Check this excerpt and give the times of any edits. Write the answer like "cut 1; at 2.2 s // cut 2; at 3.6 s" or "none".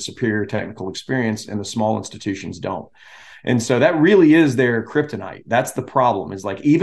none